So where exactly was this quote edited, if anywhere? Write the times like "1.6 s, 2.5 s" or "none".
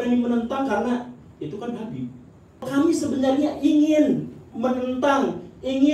2.7 s

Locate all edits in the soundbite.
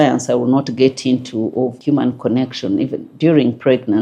1.8 s

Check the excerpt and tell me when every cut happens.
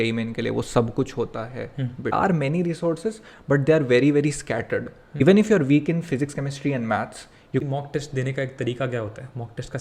2.1 s, 5.2 s, 7.6 s

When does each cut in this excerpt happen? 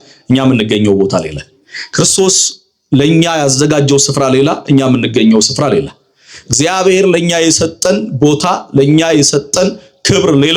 none

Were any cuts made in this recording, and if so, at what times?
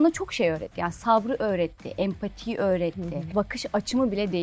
3.4 s

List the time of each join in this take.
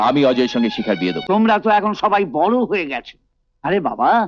1.1 s

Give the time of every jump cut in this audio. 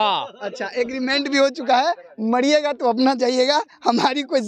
none

